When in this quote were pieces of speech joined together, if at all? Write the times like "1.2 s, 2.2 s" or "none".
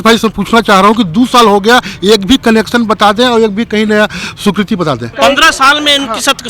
5.1 s